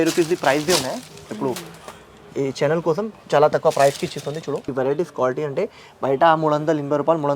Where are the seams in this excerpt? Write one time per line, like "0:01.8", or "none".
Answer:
0:04.7